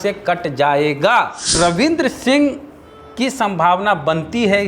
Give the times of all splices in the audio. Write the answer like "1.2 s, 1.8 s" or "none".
1.5 s